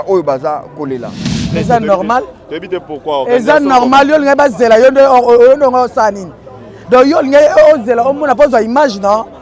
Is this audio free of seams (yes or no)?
no